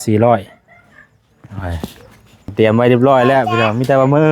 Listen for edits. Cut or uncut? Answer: cut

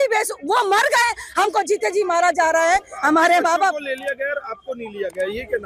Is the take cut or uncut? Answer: uncut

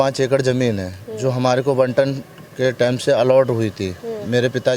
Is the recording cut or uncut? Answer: uncut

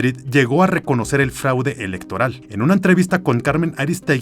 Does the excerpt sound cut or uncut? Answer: cut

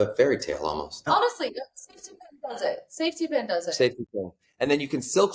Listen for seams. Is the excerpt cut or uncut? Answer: cut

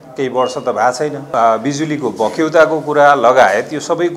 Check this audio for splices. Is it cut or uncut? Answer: cut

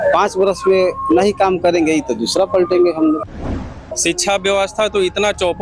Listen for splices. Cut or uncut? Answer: cut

